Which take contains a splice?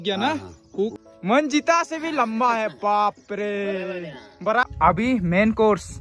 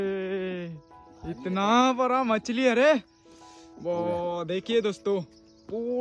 first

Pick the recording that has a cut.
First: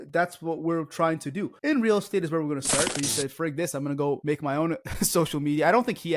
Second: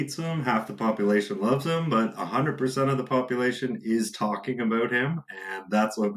first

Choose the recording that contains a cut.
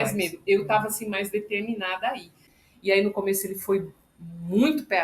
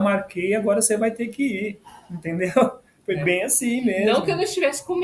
first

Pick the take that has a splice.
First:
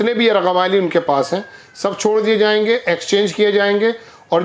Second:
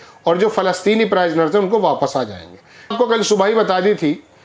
second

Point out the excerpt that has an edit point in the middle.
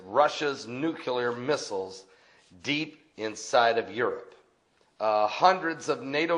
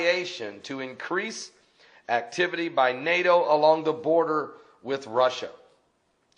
second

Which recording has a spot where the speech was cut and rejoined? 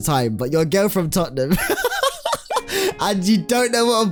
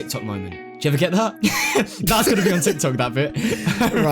second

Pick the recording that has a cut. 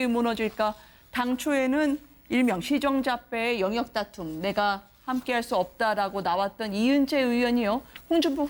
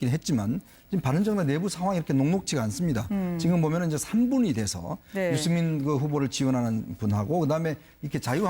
second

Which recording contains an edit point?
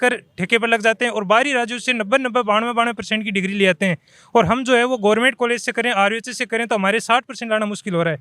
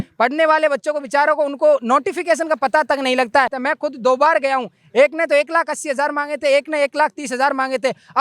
second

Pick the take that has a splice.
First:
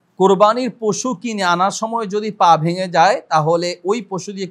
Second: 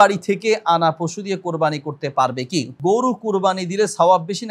second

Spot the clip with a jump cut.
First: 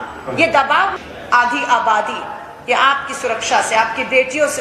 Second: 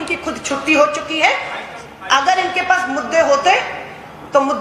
first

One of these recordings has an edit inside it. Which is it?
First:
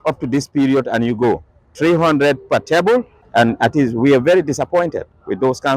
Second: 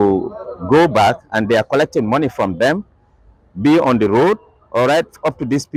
first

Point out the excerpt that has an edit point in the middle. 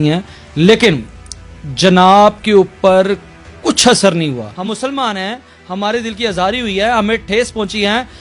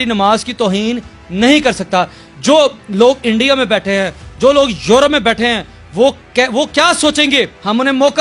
first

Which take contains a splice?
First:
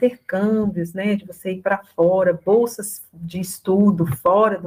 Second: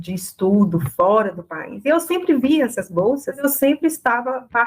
second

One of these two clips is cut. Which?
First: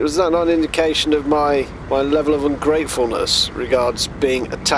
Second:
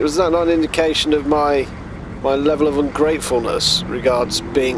first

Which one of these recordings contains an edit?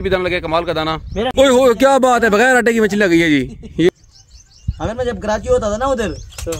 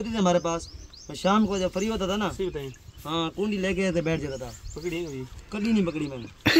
first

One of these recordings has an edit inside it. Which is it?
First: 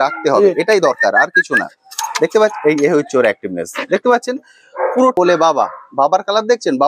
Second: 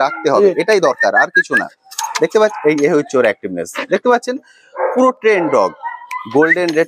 first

